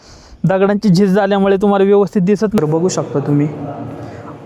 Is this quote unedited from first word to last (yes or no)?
no